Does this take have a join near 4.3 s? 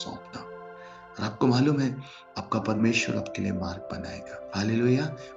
yes; 1 cut; at 4.3 s

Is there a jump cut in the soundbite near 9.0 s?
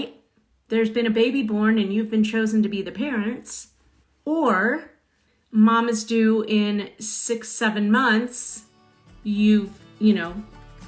no; 0 cuts

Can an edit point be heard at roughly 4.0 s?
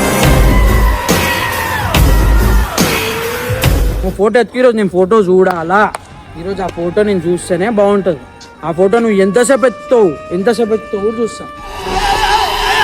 yes; 1 cut; at 4.0 s

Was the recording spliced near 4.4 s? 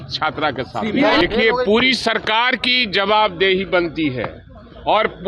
no; 1 cut; at 1.2 s

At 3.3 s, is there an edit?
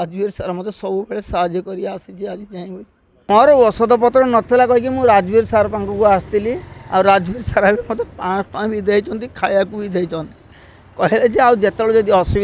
yes; 1 cut; at 3.3 s

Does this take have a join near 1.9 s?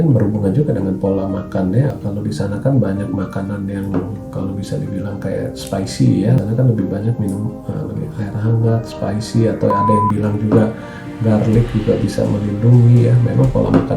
yes; 2 cuts; at 1.9 s, 6.4 s

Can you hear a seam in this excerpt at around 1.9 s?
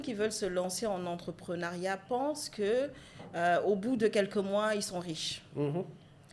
no; 0 cuts

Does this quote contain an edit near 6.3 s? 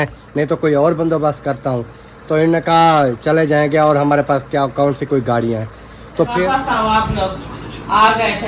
yes; 1 cut; at 6.3 s

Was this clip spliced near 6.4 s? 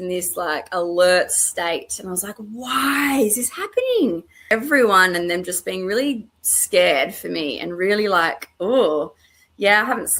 no; 1 cut; at 4.5 s

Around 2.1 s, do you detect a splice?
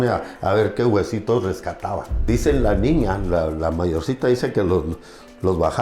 yes; 1 cut; at 2.1 s

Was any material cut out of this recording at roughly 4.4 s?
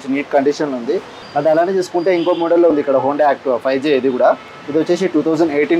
no; 1 cut; at 1.1 s

